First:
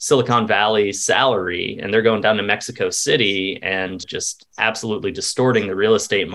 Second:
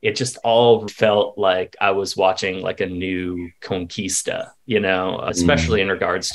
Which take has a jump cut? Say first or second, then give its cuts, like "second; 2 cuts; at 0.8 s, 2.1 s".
second; 2 cuts; at 0.9 s, 5.2 s